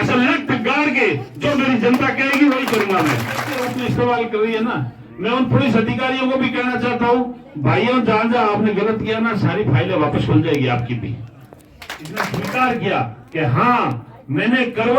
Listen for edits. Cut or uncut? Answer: cut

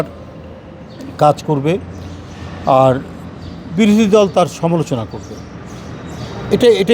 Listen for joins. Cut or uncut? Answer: uncut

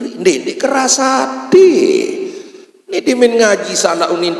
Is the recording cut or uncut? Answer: uncut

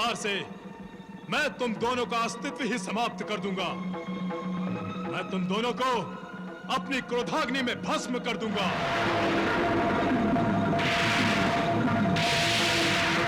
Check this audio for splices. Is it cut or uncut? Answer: cut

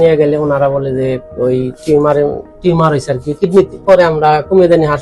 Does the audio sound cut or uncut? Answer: cut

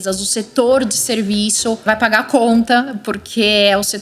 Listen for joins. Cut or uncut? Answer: cut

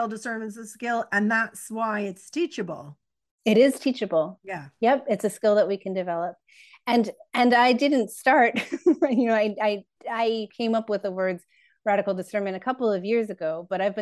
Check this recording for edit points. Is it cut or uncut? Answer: cut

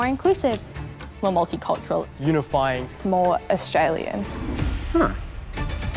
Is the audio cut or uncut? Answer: cut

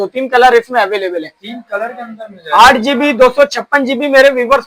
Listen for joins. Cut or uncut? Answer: uncut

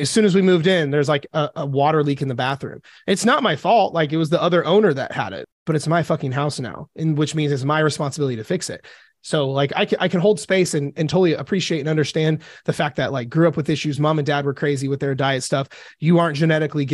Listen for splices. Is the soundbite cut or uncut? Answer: cut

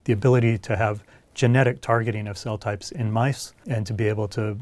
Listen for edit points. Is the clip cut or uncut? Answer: cut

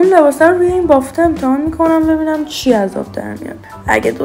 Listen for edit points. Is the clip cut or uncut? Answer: uncut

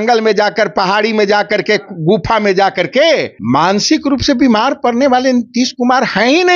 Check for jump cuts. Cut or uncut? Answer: cut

